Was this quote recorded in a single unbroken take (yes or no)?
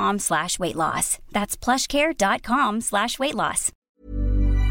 no